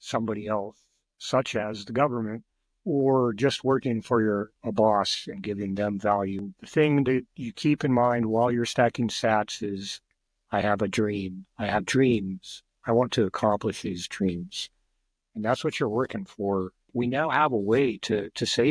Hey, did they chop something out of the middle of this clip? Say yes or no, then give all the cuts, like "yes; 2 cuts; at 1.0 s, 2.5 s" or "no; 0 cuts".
yes; 2 cuts; at 6.5 s, 16.9 s